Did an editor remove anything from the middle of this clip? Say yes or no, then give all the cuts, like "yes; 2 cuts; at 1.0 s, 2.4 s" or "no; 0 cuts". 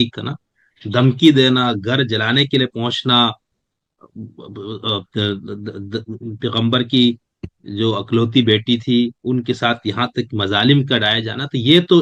no; 0 cuts